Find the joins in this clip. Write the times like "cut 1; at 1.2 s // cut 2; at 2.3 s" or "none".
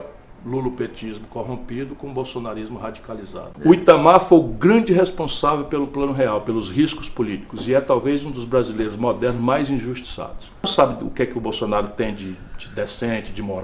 cut 1; at 3.4 s // cut 2; at 10.7 s